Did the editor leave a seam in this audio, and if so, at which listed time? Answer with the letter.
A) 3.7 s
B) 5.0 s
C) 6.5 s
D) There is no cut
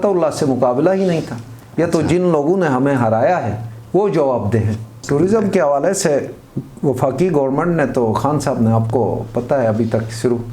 B